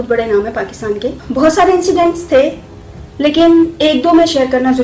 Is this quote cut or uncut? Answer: cut